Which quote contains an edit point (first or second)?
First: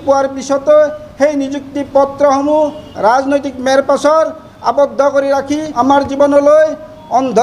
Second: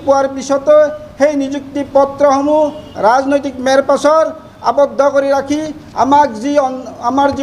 first